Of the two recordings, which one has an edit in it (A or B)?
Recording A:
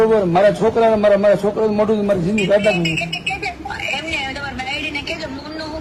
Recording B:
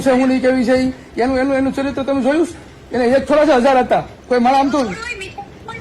B